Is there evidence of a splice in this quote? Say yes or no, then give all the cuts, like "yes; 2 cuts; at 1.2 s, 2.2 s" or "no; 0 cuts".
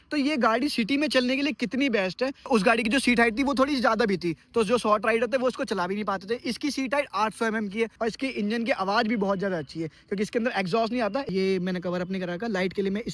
yes; 3 cuts; at 2.5 s, 7.9 s, 11.3 s